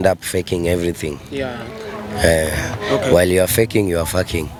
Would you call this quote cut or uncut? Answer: uncut